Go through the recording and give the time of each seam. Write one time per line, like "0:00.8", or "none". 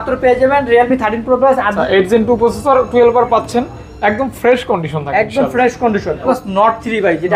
0:01.8
0:06.2